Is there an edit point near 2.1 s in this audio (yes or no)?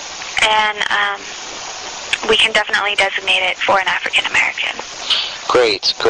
no